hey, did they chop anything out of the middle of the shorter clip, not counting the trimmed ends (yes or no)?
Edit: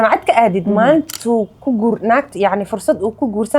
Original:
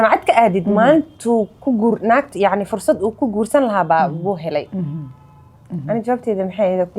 no